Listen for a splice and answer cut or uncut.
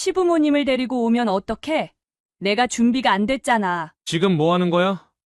cut